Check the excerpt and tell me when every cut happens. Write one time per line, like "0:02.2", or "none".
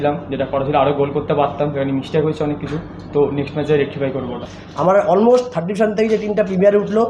0:04.4